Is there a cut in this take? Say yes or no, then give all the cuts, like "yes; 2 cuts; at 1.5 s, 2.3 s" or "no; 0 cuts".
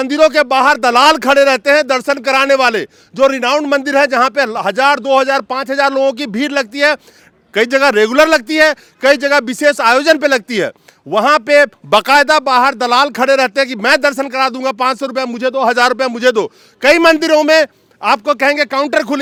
no; 0 cuts